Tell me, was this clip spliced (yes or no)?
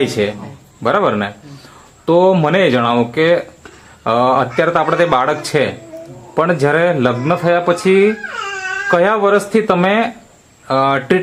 no